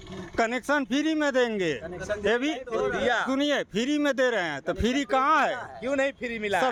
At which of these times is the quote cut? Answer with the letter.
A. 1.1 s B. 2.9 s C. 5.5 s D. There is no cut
D